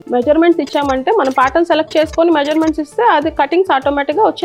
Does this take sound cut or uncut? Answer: uncut